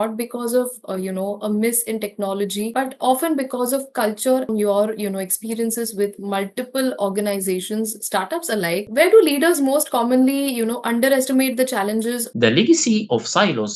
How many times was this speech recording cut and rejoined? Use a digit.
2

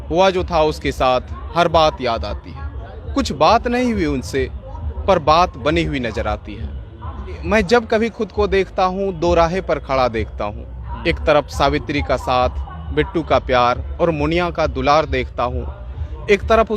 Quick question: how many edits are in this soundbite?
1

